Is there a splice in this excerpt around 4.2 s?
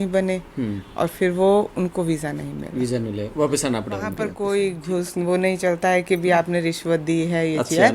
yes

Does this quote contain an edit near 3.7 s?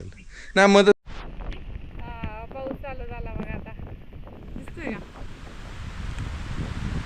no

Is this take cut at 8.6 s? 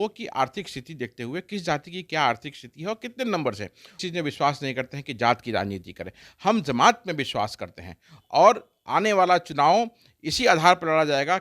no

